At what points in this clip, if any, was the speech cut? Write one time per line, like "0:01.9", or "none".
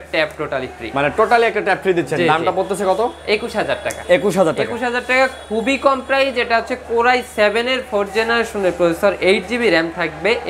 none